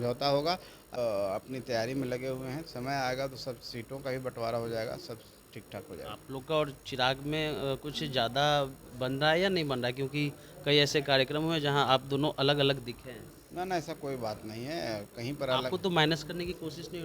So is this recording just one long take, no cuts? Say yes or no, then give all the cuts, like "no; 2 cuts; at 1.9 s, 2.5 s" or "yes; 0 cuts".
no; 1 cut; at 1.0 s